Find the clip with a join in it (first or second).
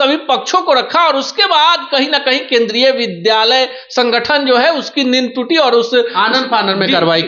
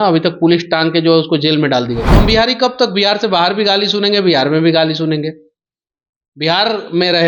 second